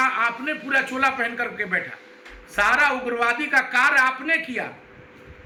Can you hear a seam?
no; 0 cuts

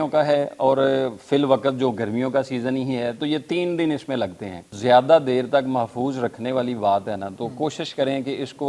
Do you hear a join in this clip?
yes; 1 cut; at 4.6 s

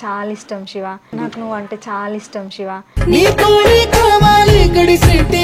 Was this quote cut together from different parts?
no; 0 cuts

